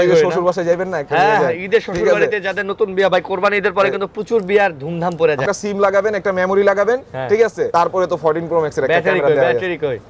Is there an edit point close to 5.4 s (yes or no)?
yes